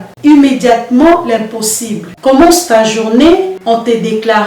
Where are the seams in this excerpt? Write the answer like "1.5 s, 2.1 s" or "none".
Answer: 2.1 s